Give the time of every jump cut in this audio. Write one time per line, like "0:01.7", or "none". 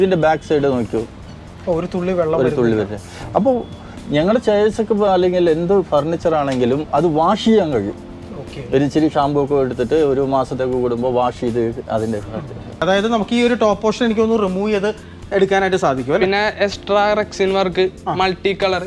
0:12.8